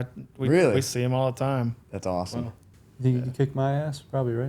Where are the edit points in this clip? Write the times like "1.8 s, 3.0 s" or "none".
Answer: 2.6 s